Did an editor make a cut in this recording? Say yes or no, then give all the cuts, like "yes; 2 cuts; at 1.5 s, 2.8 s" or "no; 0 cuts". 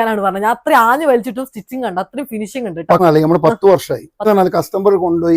yes; 2 cuts; at 3.0 s, 4.3 s